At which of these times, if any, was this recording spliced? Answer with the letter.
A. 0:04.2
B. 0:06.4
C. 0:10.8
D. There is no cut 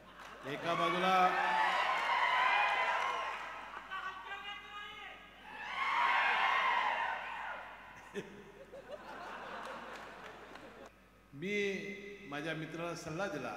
C